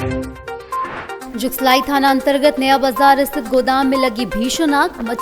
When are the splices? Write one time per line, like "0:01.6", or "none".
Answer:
0:01.2